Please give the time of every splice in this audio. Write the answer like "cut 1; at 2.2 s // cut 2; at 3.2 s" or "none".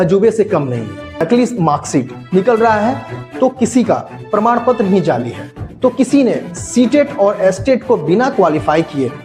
cut 1; at 1.2 s